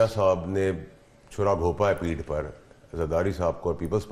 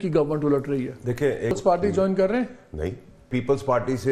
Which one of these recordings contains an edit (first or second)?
second